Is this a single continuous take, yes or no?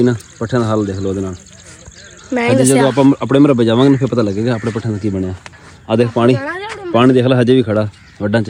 yes